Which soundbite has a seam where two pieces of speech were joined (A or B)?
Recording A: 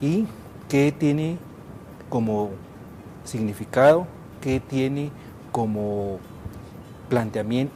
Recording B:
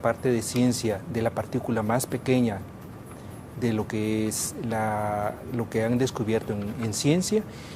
B